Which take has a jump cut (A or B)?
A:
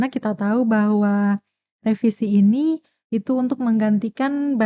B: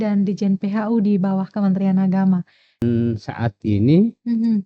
B